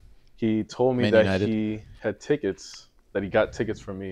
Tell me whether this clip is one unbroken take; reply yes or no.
yes